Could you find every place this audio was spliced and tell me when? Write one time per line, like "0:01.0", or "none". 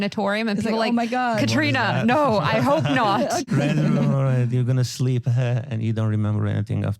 0:03.5